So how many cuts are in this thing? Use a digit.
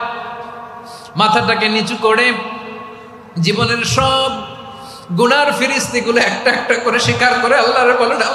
1